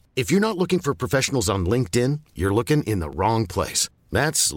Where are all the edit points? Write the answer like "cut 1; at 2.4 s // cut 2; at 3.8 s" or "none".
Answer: none